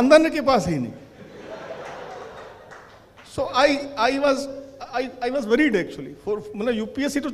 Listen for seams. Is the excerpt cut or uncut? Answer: uncut